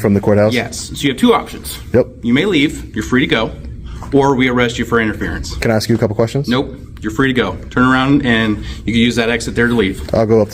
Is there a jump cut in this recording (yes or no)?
no